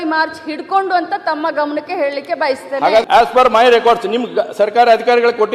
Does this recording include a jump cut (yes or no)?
yes